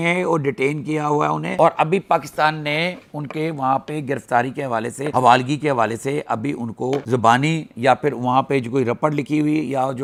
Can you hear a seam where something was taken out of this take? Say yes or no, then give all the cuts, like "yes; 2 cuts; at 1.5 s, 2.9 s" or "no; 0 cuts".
no; 0 cuts